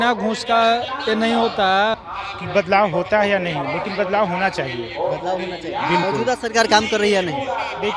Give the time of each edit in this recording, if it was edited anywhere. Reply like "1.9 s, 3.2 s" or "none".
1.9 s